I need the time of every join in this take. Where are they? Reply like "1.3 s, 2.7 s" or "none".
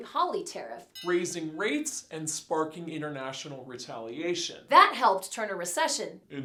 none